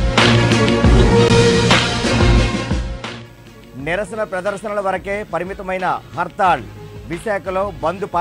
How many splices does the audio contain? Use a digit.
1